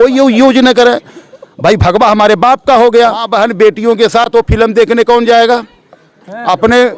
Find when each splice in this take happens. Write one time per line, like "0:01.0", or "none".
0:03.2